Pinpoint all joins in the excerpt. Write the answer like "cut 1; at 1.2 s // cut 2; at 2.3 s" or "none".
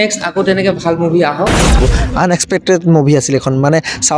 cut 1; at 1.8 s